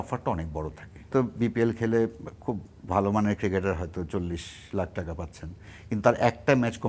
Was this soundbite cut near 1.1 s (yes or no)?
yes